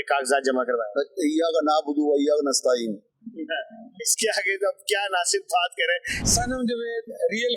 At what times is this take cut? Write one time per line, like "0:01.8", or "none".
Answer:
0:06.1